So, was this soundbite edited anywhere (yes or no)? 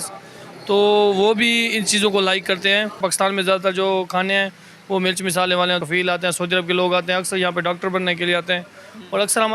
yes